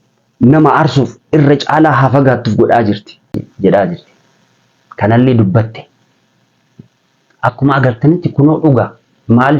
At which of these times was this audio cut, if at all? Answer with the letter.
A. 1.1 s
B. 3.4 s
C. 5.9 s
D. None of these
B